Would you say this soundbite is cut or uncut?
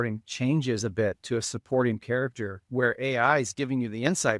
uncut